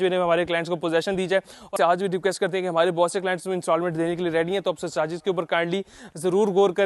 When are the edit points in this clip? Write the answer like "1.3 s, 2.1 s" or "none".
1.7 s